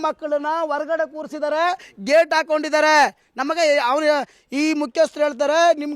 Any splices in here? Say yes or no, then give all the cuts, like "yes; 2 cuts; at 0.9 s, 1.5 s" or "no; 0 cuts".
no; 0 cuts